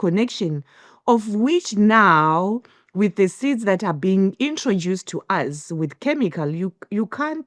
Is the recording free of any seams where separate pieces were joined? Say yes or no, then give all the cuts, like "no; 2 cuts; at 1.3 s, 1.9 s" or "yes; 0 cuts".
yes; 0 cuts